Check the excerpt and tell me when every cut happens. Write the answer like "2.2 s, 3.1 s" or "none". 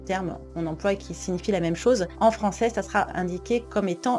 2.1 s, 3.1 s